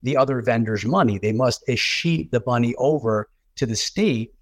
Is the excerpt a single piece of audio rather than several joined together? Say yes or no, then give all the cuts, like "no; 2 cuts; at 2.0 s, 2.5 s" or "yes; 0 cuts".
yes; 0 cuts